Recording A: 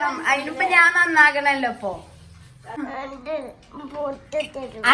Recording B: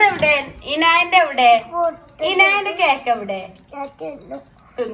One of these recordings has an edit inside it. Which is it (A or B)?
A